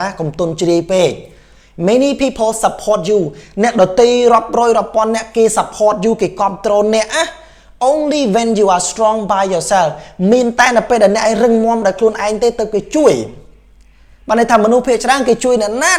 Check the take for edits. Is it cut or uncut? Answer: uncut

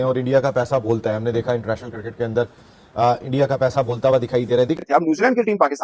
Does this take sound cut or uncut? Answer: cut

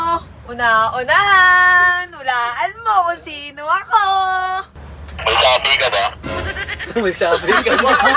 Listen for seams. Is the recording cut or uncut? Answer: cut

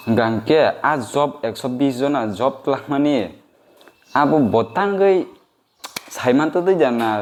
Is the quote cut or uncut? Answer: uncut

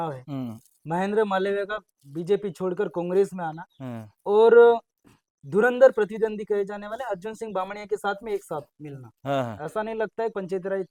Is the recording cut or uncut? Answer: uncut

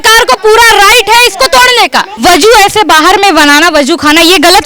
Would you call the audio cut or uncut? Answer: cut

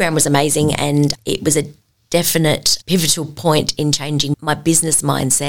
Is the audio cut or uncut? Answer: cut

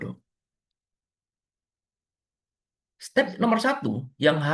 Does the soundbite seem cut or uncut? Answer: uncut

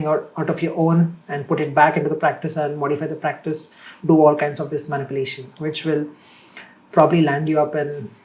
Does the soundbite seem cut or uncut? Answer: uncut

